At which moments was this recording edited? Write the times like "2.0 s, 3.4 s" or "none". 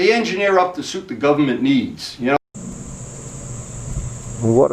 2.4 s